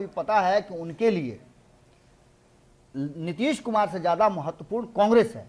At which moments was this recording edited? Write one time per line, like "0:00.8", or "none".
none